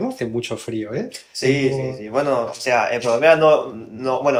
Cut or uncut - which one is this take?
uncut